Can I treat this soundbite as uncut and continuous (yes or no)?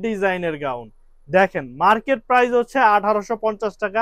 yes